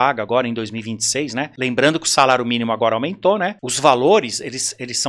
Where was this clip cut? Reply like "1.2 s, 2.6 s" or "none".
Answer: 1.5 s, 3.6 s